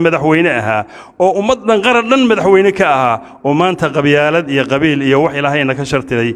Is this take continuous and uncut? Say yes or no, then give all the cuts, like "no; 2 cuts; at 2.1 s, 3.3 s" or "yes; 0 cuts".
yes; 0 cuts